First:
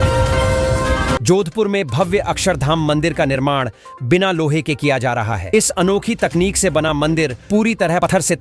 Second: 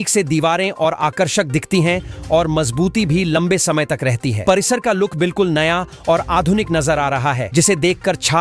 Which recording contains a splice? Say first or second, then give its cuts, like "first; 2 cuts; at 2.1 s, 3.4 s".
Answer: first; 1 cut; at 1.2 s